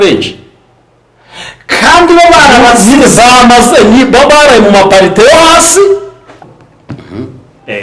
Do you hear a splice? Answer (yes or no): yes